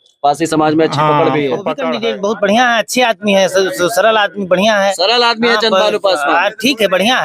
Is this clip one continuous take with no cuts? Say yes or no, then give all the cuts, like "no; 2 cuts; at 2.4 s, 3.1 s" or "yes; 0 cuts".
no; 1 cut; at 1.9 s